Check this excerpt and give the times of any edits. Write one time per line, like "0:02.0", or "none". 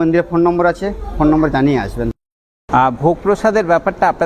none